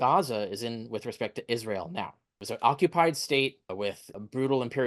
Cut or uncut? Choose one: cut